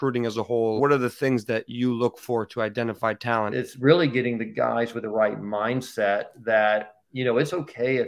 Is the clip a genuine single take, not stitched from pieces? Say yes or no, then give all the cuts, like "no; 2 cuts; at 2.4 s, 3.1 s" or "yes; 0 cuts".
no; 2 cuts; at 0.8 s, 3.5 s